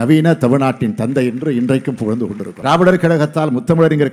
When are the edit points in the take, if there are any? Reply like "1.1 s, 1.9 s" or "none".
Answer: 2.5 s

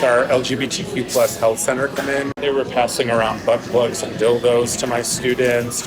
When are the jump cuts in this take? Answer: 2.3 s

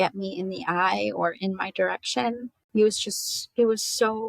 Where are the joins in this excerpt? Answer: 2.5 s

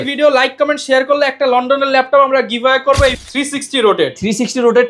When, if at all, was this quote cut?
3.2 s

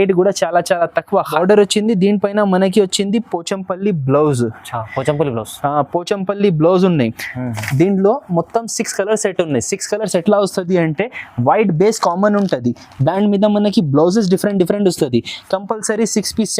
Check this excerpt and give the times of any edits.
1.3 s

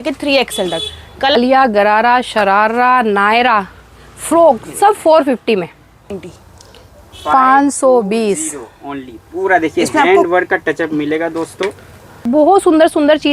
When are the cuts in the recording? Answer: 1.4 s, 6.2 s, 12.2 s

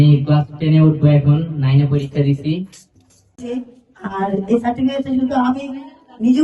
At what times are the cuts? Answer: 3.3 s

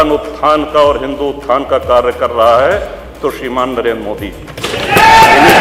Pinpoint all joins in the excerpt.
none

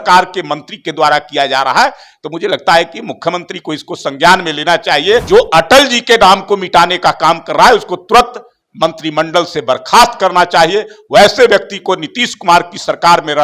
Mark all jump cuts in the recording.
5.2 s

